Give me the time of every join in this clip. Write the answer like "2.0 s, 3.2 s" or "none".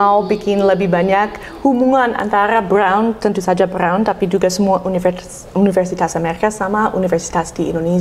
none